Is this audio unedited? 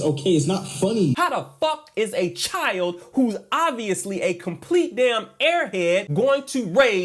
no; 1 cut; at 1.2 s

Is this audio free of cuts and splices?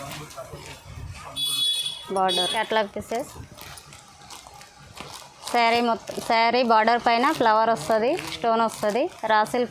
no; 1 cut; at 2.5 s

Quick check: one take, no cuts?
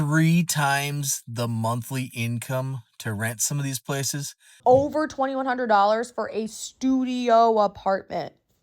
no; 1 cut; at 4.6 s

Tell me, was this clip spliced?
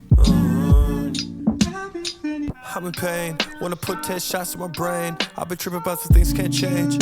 yes; 2 cuts; at 1.3 s, 2.4 s

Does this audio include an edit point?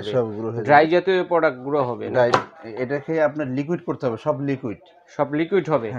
no; 0 cuts

